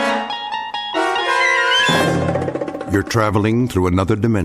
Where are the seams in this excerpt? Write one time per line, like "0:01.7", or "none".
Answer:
0:02.8

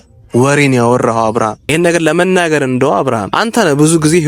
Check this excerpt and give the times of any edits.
0:01.6
0:03.3

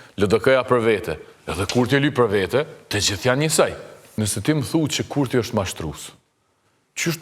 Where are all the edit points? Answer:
0:04.0

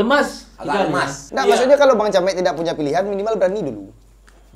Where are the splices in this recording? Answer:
0:01.2

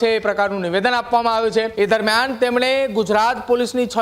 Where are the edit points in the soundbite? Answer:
0:01.7

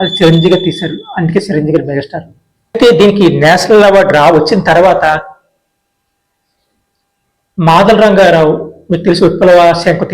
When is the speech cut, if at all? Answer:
0:02.8

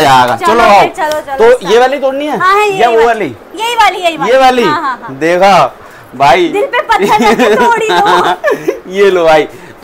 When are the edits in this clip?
none

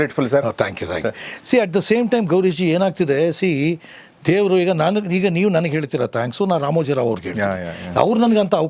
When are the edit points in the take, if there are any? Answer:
none

